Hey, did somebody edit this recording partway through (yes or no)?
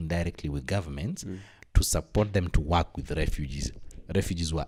no